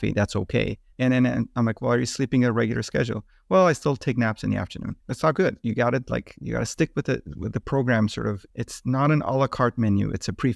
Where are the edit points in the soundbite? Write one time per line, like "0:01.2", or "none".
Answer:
0:05.0
0:08.5